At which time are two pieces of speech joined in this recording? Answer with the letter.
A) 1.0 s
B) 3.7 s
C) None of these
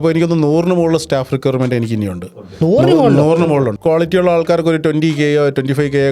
B